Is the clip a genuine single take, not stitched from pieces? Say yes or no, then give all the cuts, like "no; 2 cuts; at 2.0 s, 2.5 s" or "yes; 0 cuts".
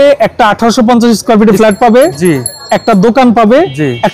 yes; 0 cuts